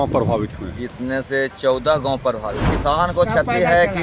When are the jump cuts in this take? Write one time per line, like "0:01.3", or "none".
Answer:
0:02.7